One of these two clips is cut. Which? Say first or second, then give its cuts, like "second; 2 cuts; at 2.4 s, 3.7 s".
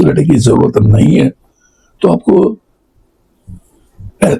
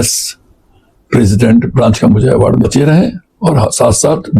second; 1 cut; at 2.6 s